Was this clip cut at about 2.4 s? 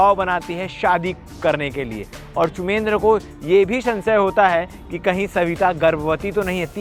no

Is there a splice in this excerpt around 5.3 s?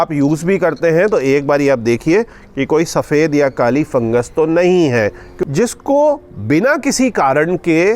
yes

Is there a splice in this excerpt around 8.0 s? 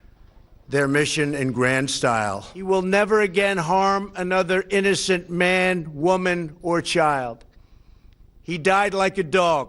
no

